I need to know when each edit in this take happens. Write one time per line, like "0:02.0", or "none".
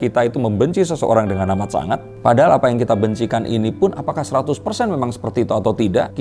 none